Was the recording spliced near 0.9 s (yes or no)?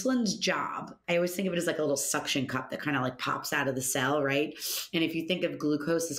yes